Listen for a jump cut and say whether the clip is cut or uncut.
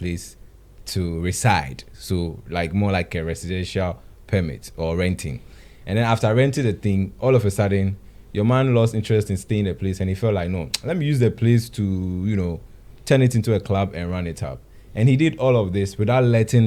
uncut